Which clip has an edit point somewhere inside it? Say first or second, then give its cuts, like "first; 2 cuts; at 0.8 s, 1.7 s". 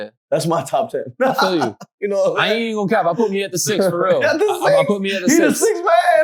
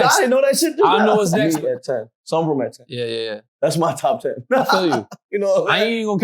second; 1 cut; at 1.4 s